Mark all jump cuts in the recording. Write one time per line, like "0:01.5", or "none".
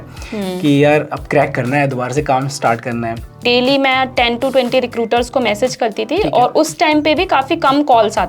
0:03.4